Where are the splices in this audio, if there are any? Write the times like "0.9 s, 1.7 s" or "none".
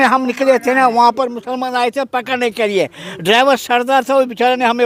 none